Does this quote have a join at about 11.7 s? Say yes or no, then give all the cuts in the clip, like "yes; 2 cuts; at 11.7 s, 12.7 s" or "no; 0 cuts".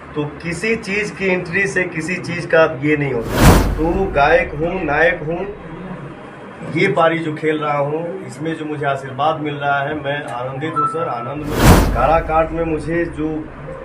yes; 2 cuts; at 3.4 s, 11.7 s